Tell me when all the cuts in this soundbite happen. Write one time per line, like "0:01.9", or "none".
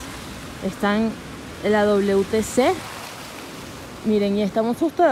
none